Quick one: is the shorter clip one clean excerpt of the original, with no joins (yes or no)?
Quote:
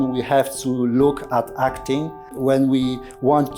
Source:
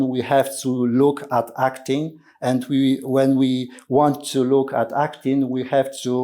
no